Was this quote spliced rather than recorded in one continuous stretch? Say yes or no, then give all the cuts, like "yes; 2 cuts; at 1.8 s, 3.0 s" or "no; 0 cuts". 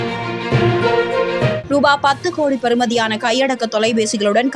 yes; 1 cut; at 1.6 s